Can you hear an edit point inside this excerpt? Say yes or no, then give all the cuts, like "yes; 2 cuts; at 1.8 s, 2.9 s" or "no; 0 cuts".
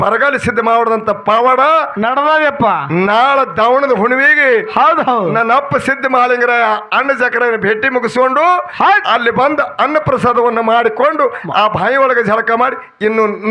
no; 0 cuts